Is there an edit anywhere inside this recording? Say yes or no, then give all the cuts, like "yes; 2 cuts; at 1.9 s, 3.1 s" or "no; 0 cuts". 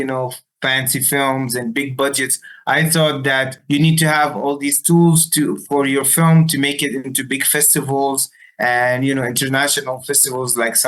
yes; 1 cut; at 3.6 s